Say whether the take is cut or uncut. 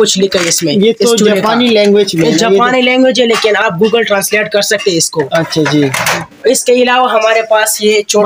uncut